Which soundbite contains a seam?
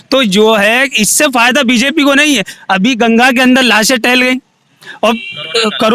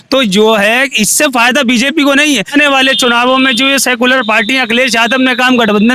second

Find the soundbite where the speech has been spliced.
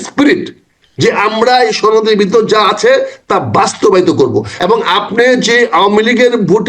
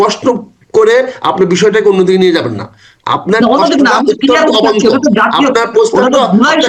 first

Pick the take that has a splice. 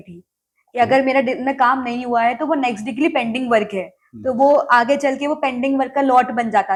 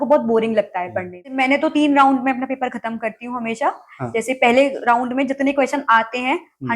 second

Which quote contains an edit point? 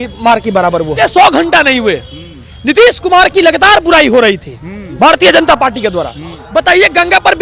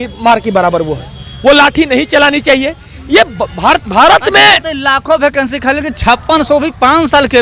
first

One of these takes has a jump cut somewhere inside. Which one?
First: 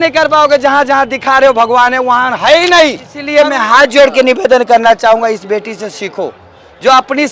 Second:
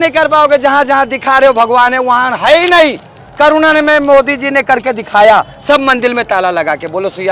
first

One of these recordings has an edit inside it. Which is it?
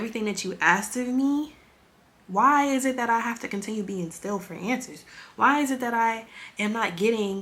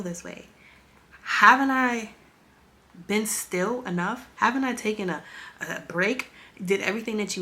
second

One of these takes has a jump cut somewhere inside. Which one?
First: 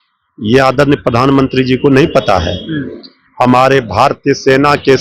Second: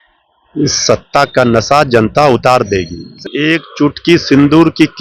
second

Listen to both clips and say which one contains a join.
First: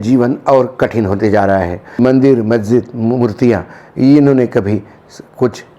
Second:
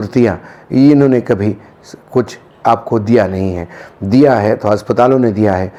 first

